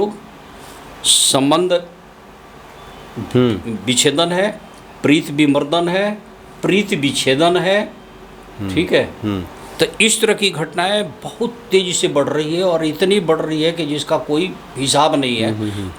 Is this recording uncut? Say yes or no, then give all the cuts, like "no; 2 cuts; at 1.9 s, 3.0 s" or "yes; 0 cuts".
yes; 0 cuts